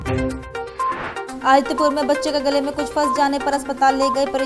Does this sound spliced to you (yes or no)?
yes